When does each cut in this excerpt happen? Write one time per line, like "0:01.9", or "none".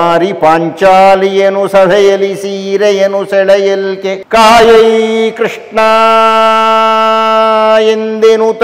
0:04.2